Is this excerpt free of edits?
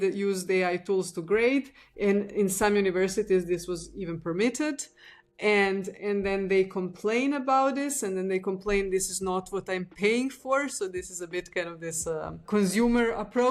no; 1 cut; at 12.4 s

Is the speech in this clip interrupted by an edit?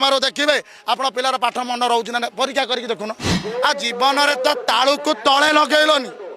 yes; 1 cut; at 3.4 s

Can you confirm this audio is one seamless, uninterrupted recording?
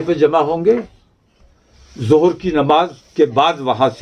yes; 0 cuts

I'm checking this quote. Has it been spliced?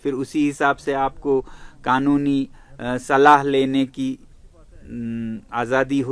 no; 0 cuts

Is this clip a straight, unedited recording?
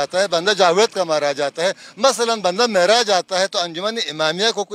yes; 0 cuts

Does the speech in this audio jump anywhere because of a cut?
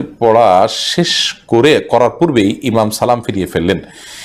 no; 0 cuts

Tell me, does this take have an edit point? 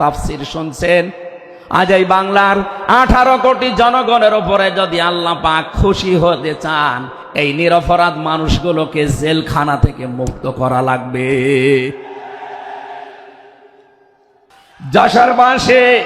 yes; 1 cut; at 14.6 s

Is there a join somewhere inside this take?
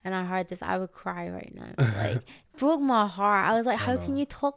no; 0 cuts

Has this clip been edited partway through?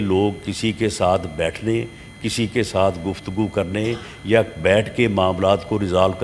no; 0 cuts

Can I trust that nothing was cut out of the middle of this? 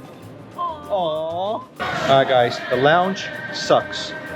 no; 1 cut; at 1.7 s

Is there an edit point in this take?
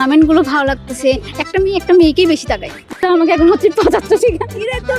yes; 1 cut; at 3.0 s

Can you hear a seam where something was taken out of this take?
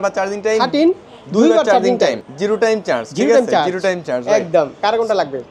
no; 0 cuts

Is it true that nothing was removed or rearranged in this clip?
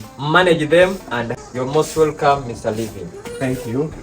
no; 1 cut; at 1.3 s

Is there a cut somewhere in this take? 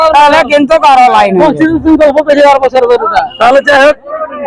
no; 0 cuts

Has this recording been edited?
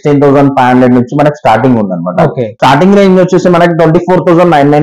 yes; 1 cut; at 2.6 s

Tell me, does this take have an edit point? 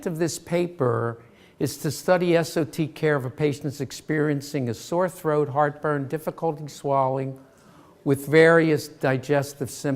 yes; 1 cut; at 5.2 s

